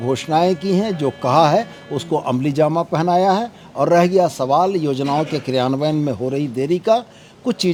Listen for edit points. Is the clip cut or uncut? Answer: uncut